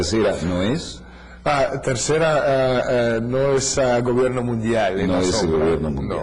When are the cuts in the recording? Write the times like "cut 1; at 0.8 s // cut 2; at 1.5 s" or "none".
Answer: cut 1; at 4.0 s